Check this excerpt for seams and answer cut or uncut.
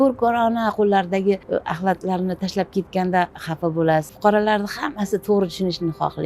cut